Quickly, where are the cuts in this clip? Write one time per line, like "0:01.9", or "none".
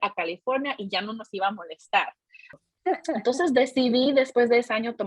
0:02.6

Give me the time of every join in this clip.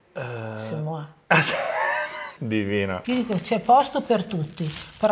0:02.3
0:03.0

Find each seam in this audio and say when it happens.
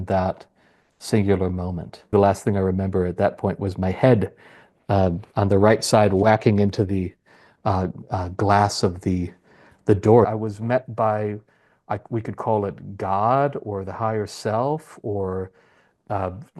0:02.1
0:10.3

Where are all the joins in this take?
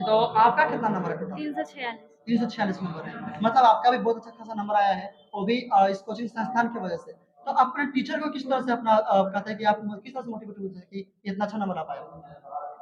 none

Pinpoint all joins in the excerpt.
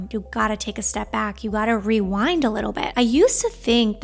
0:02.9

